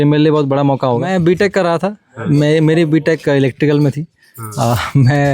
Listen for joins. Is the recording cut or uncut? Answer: cut